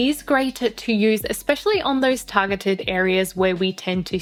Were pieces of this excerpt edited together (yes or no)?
no